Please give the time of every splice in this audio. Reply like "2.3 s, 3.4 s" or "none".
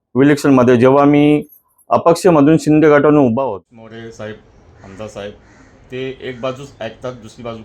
3.4 s